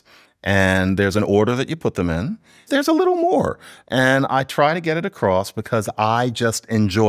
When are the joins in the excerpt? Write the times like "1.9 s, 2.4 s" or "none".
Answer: 2.6 s

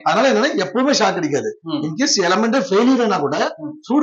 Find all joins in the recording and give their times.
none

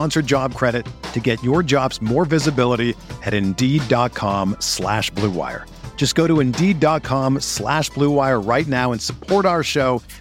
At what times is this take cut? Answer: none

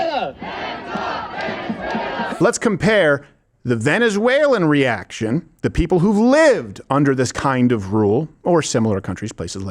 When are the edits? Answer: 2.3 s

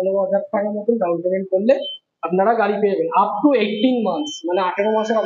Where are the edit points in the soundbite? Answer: none

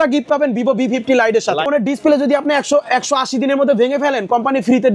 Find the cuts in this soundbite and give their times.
1.7 s

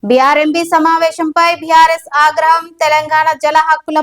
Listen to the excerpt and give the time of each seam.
none

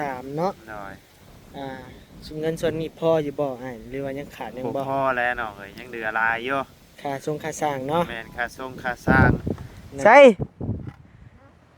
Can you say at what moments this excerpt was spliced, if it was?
9.1 s

